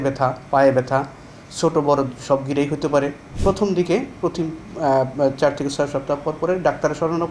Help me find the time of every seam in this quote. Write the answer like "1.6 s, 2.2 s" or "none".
3.2 s